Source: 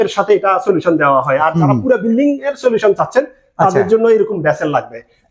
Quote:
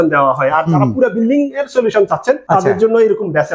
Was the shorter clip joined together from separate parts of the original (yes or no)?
yes